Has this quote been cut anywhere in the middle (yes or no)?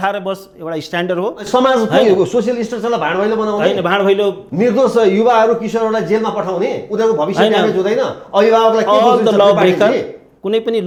no